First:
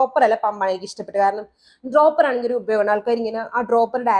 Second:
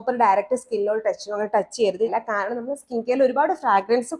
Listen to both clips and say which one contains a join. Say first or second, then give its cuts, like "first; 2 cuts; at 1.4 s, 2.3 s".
second; 1 cut; at 2.1 s